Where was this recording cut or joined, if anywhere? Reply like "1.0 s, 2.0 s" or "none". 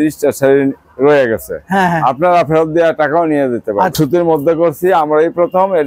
3.9 s